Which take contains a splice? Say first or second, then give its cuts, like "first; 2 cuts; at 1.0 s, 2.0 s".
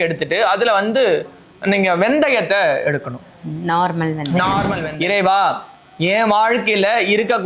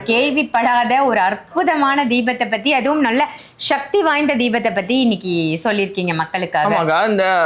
first; 1 cut; at 4.8 s